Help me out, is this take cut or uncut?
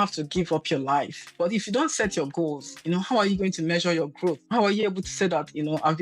cut